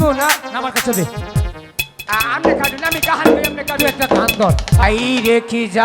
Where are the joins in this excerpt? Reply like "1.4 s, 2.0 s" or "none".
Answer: 4.8 s

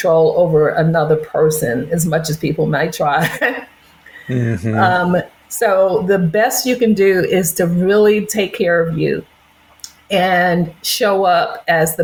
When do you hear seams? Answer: none

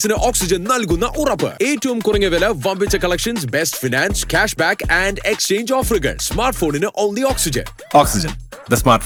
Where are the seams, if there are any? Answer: none

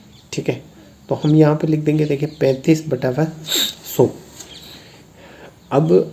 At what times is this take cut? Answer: none

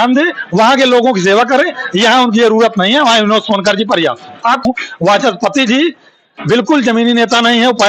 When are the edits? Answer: 4.6 s

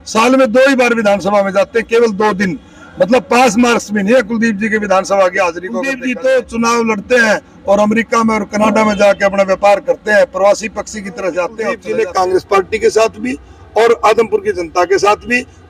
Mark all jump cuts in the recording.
5.9 s, 11.7 s

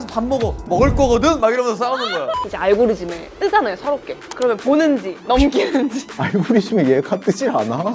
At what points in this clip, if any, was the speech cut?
2.5 s, 3.2 s, 4.2 s, 5.1 s, 6.1 s

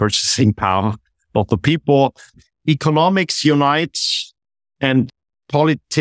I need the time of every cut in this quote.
2.3 s, 5.1 s

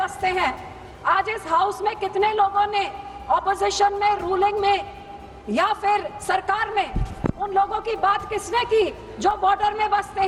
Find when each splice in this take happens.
none

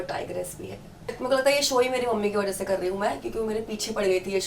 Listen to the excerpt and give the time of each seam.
1.2 s

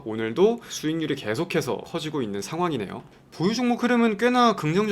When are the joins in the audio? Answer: 3.0 s

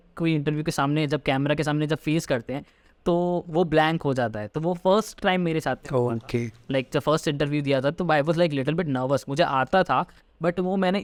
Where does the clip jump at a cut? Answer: none

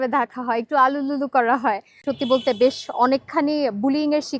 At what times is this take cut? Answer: 2.0 s

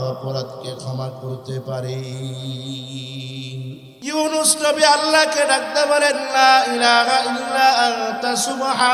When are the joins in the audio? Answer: 3.9 s

